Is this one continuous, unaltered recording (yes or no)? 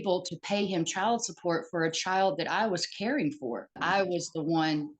no